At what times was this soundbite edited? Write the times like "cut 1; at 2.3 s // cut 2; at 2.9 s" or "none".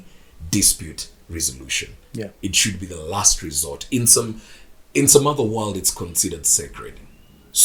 none